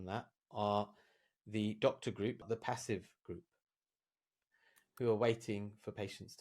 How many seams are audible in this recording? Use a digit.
2